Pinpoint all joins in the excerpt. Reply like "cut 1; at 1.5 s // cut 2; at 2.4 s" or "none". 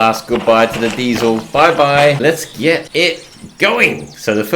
cut 1; at 2.5 s